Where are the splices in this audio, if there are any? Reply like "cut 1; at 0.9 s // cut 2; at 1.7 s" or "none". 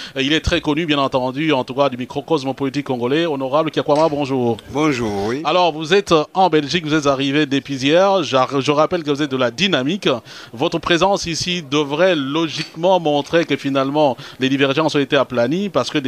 cut 1; at 1.1 s